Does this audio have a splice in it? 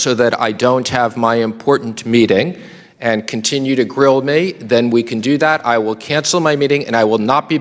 no; 0 cuts

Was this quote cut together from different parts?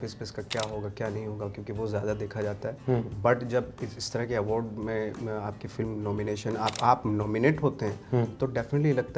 no; 0 cuts

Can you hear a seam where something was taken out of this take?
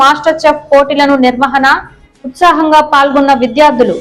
no; 0 cuts

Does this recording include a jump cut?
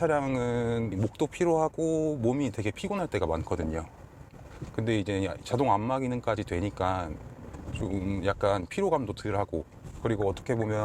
yes; 1 cut; at 0.9 s

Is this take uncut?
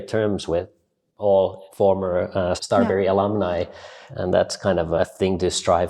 no; 4 cuts; at 1.6 s, 2.6 s, 4.0 s, 5.0 s

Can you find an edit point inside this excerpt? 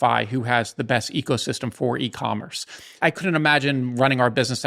yes; 1 cut; at 3.0 s

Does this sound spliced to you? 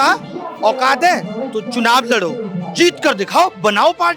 no; 0 cuts

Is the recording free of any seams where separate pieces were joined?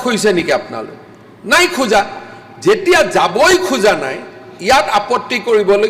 yes; 0 cuts

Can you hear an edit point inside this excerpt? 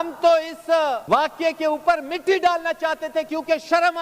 yes; 1 cut; at 1.0 s

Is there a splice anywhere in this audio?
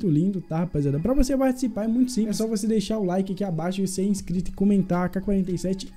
yes; 1 cut; at 2.3 s

